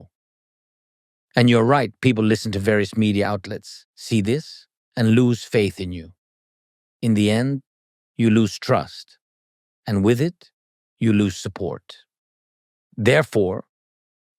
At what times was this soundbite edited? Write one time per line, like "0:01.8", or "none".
none